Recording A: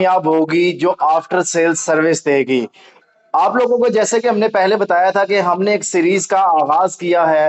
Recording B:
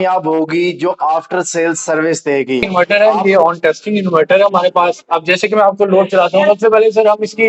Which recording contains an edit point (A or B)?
B